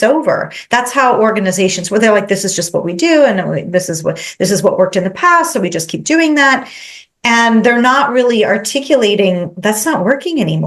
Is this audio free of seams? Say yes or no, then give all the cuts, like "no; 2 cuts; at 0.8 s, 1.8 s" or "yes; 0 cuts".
yes; 0 cuts